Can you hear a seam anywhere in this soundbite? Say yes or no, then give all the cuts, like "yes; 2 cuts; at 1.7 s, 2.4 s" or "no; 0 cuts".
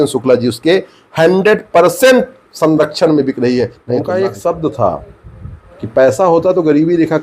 yes; 1 cut; at 3.9 s